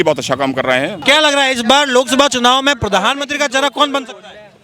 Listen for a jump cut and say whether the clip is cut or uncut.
cut